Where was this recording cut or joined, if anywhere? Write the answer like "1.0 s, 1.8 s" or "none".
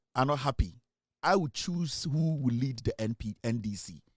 none